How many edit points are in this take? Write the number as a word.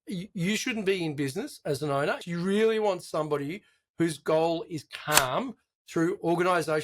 one